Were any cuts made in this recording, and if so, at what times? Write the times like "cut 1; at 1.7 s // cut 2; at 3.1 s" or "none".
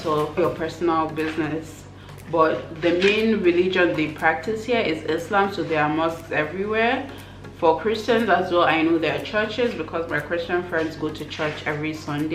none